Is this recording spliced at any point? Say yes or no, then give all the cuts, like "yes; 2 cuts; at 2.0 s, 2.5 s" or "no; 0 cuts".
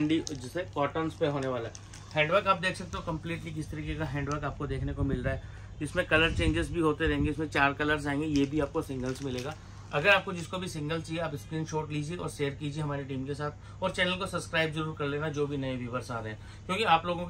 no; 0 cuts